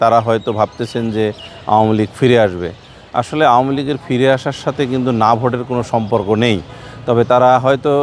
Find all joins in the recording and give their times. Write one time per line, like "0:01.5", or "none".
none